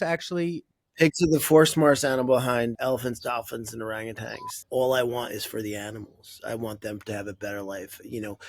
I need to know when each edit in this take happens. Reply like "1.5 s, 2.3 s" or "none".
2.8 s, 4.7 s